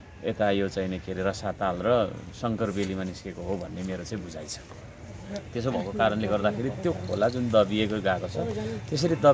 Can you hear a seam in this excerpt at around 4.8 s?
no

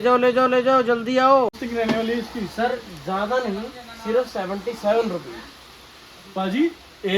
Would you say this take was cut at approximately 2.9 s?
no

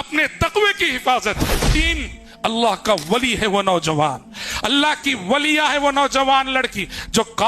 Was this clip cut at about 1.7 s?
yes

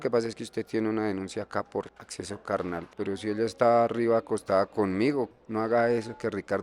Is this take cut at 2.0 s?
yes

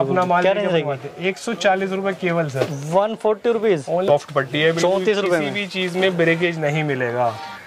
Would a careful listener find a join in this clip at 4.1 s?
yes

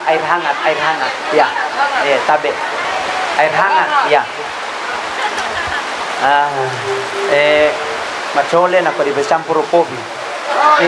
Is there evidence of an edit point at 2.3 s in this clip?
no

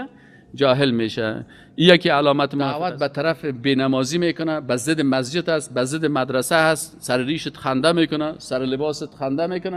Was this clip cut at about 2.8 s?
yes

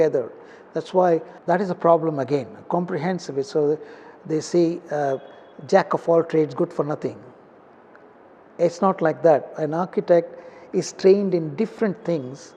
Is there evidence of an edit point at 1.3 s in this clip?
yes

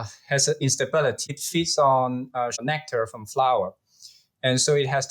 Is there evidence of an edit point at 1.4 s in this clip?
yes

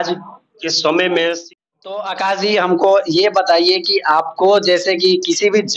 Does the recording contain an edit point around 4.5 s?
no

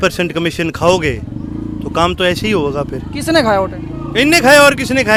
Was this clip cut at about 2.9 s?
no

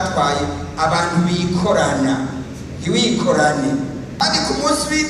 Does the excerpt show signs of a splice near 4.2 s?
yes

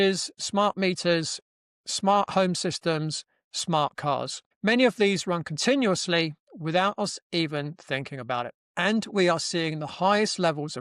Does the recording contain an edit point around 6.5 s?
no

